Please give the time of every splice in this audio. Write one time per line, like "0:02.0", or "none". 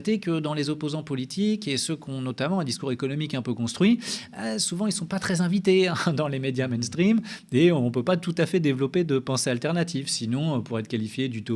none